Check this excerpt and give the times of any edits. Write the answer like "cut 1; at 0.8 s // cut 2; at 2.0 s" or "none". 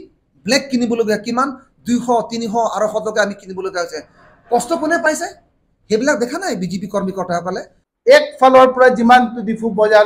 cut 1; at 7.8 s